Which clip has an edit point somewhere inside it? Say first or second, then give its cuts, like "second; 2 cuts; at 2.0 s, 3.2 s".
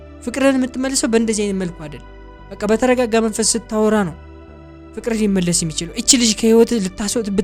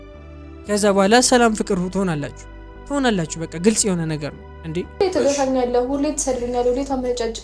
second; 1 cut; at 4.9 s